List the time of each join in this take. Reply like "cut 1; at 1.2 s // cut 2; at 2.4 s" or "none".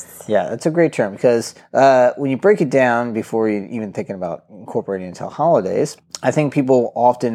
cut 1; at 1.6 s // cut 2; at 6.1 s